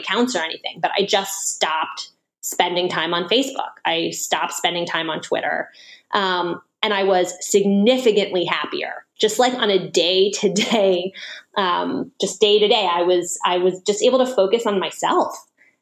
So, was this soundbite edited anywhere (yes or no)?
no